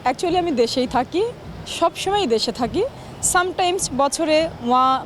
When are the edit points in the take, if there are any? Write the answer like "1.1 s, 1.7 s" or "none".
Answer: none